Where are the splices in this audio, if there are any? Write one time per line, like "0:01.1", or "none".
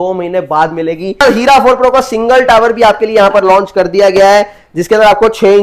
0:01.2